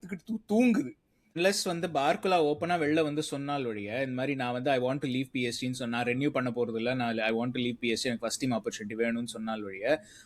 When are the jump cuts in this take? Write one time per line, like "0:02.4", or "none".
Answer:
0:01.3